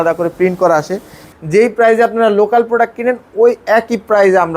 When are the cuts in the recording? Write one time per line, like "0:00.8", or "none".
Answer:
0:01.3